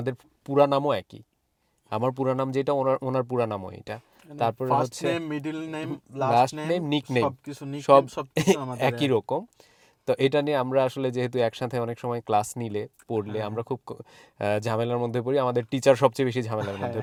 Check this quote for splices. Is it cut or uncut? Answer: uncut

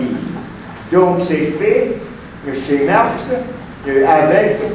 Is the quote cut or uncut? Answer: uncut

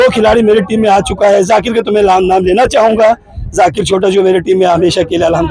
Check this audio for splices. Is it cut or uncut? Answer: uncut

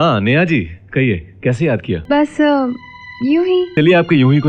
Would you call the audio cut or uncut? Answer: cut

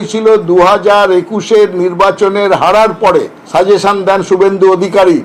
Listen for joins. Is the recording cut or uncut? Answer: uncut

